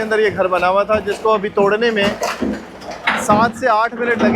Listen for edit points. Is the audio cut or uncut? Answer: uncut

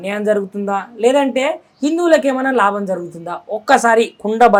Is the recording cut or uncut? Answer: uncut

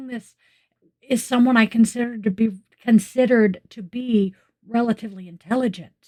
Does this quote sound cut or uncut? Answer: uncut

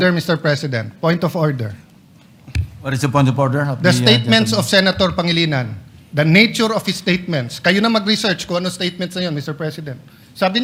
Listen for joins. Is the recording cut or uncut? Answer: uncut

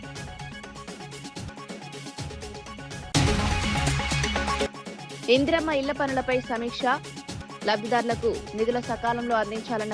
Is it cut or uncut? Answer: cut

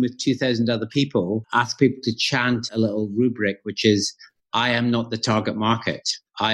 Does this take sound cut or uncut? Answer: cut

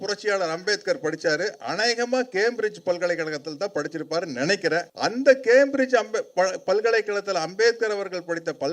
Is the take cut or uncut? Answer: cut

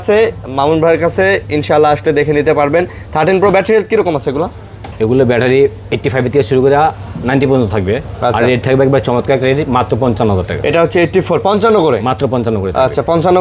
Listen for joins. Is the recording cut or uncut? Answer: uncut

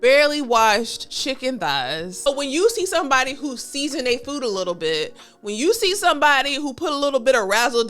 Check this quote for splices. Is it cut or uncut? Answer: cut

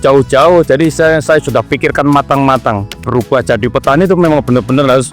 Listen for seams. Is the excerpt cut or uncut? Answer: cut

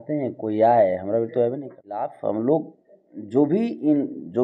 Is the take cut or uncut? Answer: cut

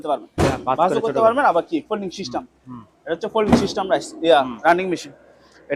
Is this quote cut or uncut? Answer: uncut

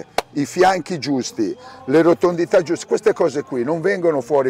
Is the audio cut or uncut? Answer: uncut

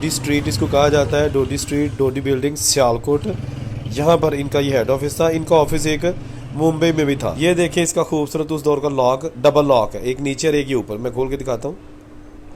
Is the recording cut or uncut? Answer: cut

